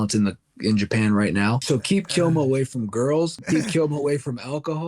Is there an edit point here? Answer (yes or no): yes